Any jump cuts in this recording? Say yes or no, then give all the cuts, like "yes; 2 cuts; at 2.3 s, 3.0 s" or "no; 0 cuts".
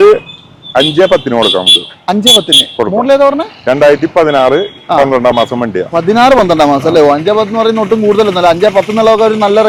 no; 0 cuts